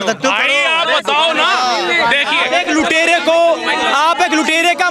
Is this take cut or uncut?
uncut